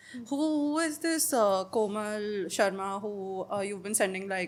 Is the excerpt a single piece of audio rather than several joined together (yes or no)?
yes